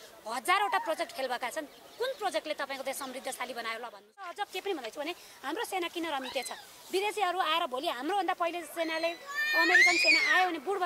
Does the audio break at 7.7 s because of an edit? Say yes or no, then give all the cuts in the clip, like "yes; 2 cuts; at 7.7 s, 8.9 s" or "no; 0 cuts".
no; 1 cut; at 4.5 s